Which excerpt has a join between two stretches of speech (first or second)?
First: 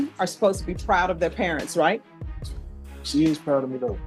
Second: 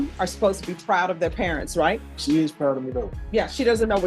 second